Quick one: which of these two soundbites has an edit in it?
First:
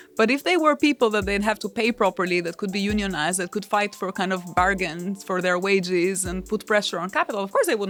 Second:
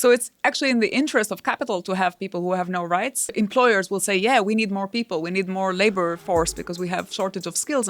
second; 1 cut; at 3.3 s

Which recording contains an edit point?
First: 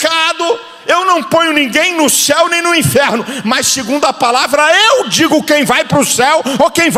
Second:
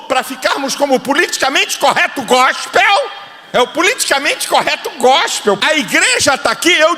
second; 1 cut; at 5.6 s

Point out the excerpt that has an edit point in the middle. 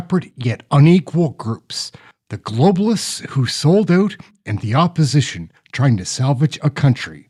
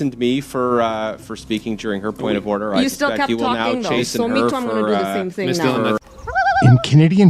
second; 1 cut; at 6.0 s

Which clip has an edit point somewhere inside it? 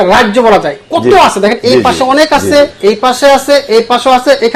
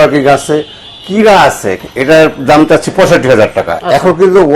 second; 2 cuts; at 1.7 s, 3.7 s

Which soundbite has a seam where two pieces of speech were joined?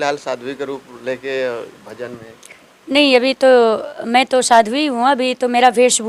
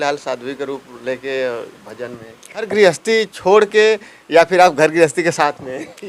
second; 1 cut; at 2.7 s

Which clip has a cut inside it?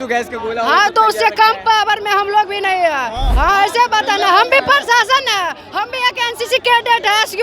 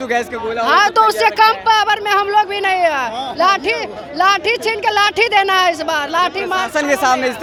first; 1 cut; at 3.2 s

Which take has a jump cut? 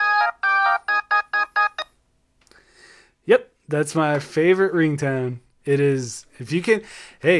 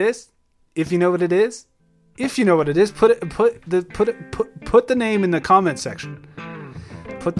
first; 1 cut; at 1.7 s

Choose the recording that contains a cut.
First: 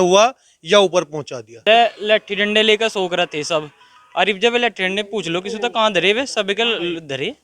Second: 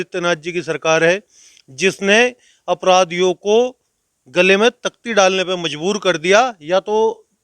first; 1 cut; at 1.6 s

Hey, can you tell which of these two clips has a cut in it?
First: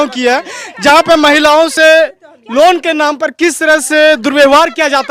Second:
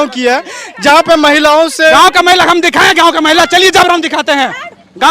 second; 1 cut; at 1.9 s

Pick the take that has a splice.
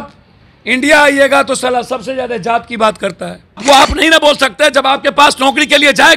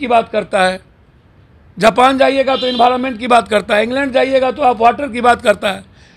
first; 1 cut; at 3.6 s

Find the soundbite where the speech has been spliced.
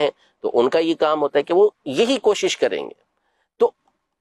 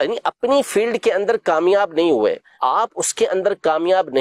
second; 1 cut; at 2.5 s

